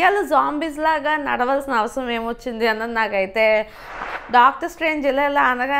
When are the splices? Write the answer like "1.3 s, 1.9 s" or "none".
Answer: 4.0 s

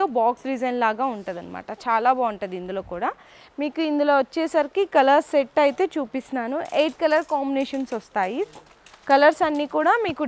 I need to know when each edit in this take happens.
none

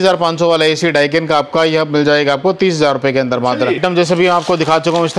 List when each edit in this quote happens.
3.8 s

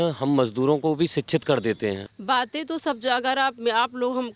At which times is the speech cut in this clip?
2.1 s

